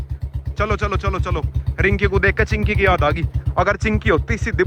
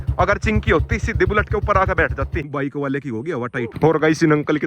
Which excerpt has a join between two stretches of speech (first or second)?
second